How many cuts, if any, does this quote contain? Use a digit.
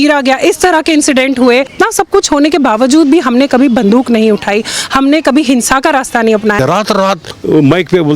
2